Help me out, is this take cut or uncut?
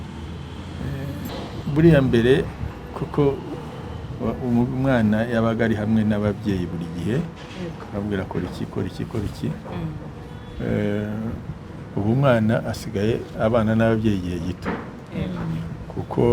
cut